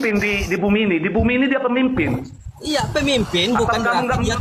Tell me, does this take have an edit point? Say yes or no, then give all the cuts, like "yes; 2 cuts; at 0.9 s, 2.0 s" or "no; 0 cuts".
no; 0 cuts